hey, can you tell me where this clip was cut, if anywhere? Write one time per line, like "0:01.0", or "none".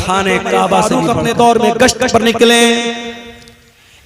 0:00.9

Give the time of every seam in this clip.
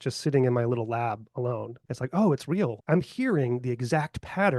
0:01.8
0:02.8

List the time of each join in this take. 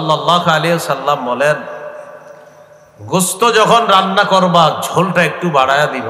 none

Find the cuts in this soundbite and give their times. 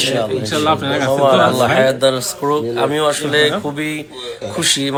none

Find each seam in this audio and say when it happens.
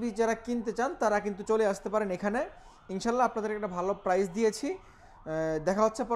none

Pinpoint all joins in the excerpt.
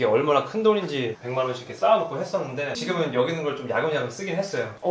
0:01.2
0:02.8

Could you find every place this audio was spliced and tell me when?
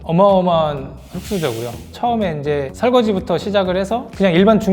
0:01.9

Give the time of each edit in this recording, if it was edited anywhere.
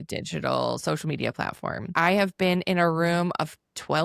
0:01.9

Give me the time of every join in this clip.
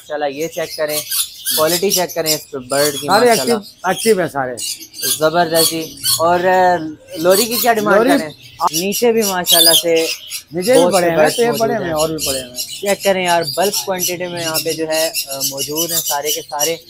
0:08.7

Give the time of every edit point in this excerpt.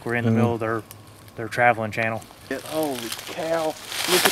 0:02.6

